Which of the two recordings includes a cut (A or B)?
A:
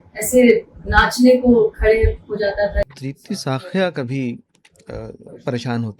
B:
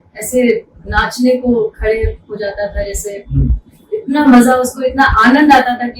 A